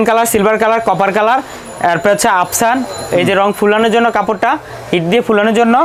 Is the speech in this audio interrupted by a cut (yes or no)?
no